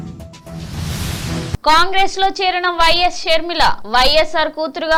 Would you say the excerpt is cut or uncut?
uncut